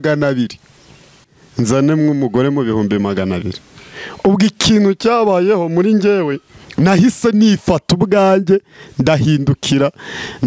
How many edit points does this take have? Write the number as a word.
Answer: one